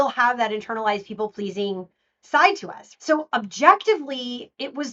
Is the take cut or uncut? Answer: cut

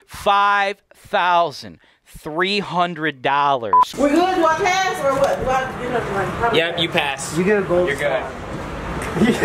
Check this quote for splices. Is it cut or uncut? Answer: cut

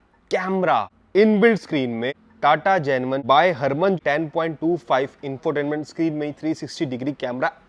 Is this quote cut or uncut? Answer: cut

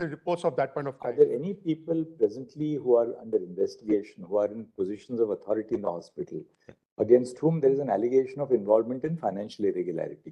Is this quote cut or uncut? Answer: cut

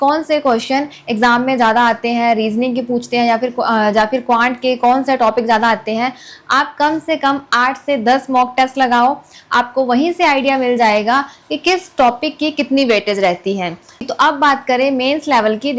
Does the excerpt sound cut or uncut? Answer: uncut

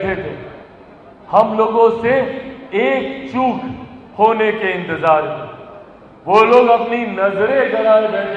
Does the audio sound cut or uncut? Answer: uncut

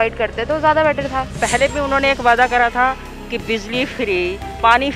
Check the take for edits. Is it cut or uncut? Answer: cut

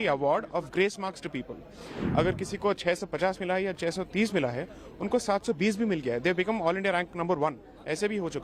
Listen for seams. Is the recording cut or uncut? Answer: uncut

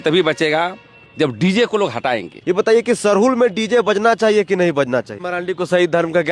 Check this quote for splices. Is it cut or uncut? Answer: cut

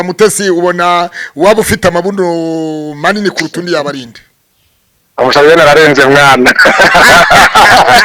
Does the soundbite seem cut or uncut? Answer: uncut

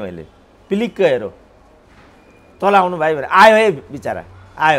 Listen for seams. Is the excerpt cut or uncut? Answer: uncut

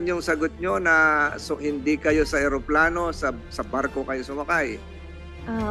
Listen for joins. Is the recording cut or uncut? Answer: uncut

